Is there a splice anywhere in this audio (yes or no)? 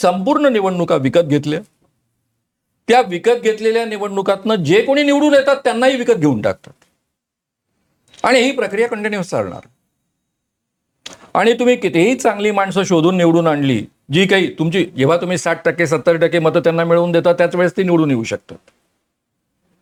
no